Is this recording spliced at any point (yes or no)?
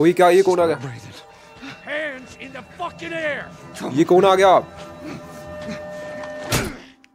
no